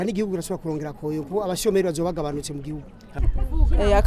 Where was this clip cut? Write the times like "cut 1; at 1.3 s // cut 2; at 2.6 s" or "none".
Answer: cut 1; at 3.0 s

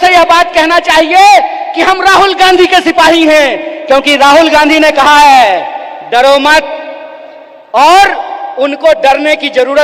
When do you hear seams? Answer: none

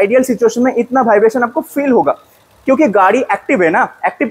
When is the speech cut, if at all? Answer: none

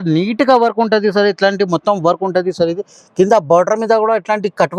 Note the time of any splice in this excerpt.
none

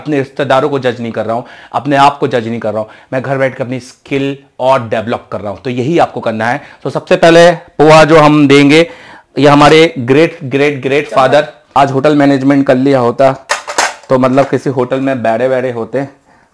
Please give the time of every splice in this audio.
cut 1; at 11.6 s

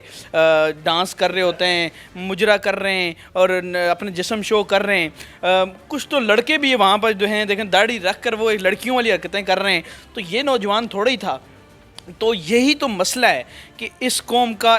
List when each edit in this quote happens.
none

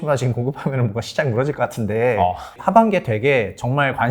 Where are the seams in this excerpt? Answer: cut 1; at 2.5 s

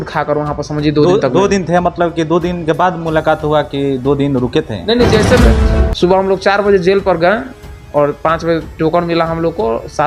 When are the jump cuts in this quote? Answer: cut 1; at 5.4 s

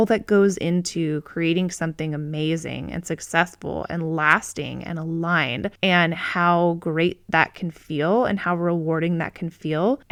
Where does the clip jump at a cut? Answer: none

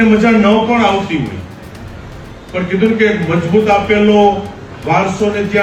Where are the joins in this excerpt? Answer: none

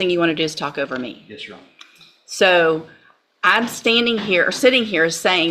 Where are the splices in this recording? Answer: none

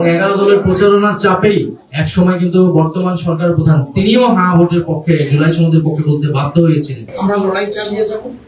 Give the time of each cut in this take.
cut 1; at 7.1 s

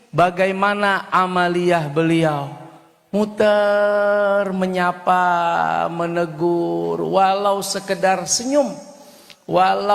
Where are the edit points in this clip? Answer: none

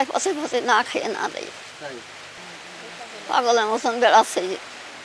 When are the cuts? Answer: none

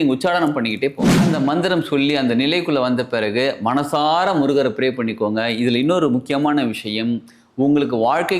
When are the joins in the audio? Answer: cut 1; at 1.1 s

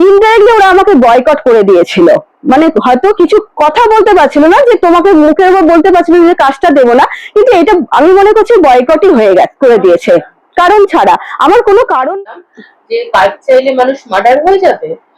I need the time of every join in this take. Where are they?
cut 1; at 12.1 s

